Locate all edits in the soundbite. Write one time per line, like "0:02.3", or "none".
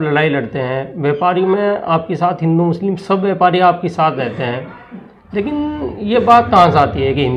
none